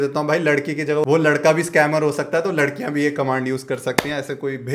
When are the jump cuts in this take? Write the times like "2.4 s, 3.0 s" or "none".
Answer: none